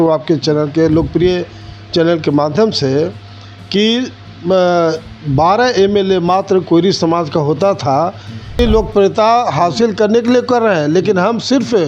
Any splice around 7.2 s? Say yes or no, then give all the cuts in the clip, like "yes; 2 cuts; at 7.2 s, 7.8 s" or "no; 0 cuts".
no; 1 cut; at 8.6 s